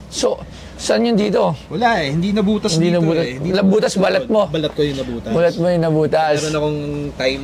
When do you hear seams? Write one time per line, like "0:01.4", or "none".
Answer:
none